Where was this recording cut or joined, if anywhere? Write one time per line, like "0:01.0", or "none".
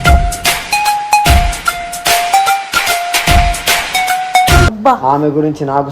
0:04.7